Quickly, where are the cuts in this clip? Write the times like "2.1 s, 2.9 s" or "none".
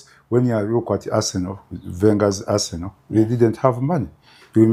none